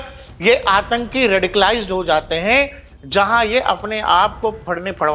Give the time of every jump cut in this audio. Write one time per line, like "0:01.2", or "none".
none